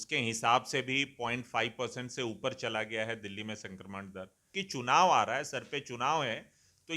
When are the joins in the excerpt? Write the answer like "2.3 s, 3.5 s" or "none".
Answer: 4.5 s